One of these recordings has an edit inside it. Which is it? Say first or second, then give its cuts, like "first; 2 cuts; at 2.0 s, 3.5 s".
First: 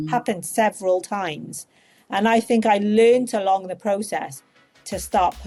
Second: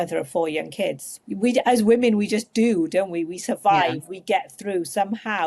second; 1 cut; at 1.1 s